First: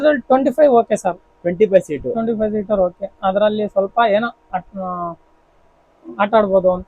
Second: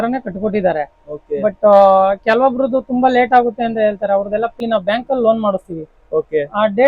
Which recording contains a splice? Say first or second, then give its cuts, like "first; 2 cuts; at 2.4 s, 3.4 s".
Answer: second; 1 cut; at 4.6 s